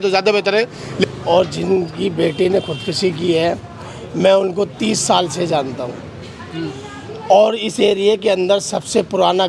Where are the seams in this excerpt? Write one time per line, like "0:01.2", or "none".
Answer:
0:01.0